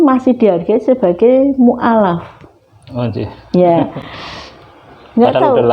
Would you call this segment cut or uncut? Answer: uncut